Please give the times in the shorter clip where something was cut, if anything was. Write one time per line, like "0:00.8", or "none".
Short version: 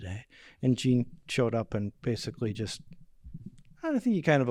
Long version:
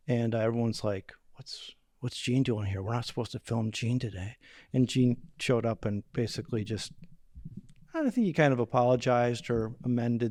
none